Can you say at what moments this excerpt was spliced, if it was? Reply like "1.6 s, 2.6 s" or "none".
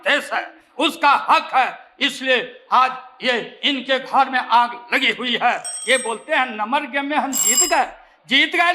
none